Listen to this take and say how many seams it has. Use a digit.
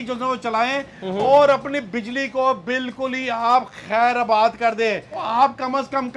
1